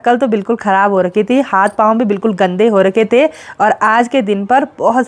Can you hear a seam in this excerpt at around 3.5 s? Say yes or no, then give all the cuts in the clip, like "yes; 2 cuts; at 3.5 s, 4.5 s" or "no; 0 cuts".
no; 0 cuts